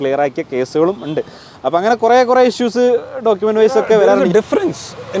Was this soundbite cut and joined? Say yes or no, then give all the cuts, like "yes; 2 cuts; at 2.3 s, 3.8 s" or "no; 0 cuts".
yes; 1 cut; at 4.2 s